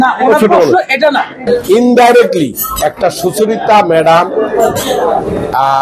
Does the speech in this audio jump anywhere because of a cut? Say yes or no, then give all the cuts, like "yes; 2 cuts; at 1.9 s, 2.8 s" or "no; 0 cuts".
yes; 1 cut; at 1.4 s